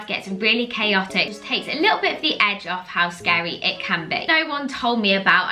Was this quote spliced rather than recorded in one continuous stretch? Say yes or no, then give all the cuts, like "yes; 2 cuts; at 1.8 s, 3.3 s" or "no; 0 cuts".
yes; 2 cuts; at 1.4 s, 4.3 s